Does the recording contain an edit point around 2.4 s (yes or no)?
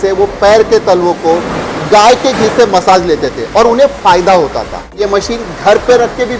no